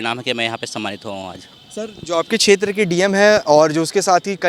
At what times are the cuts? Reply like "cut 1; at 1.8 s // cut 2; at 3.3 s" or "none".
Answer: none